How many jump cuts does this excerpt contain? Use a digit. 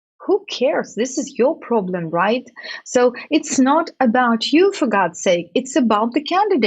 0